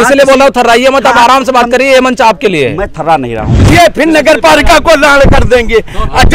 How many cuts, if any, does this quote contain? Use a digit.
1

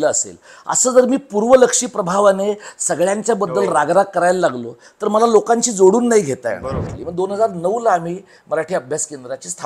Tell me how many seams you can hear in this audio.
1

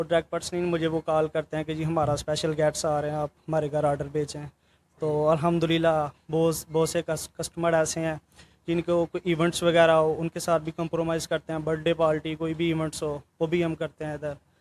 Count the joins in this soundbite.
0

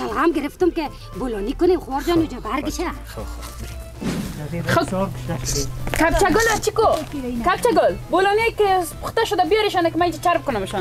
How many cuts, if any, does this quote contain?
1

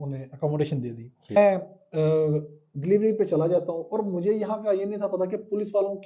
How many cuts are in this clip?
1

